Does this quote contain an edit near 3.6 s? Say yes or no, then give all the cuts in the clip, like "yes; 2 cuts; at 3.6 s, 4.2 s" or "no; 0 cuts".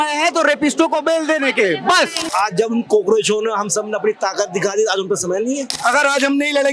no; 2 cuts; at 2.3 s, 5.8 s